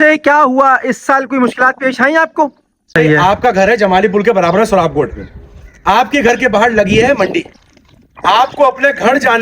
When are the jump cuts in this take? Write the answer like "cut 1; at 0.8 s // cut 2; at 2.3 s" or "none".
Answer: cut 1; at 2.9 s